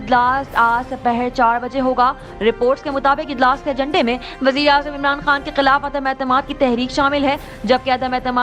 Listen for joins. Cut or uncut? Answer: uncut